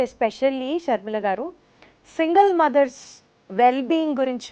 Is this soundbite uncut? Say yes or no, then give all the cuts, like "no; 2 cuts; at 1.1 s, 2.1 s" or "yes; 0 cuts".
yes; 0 cuts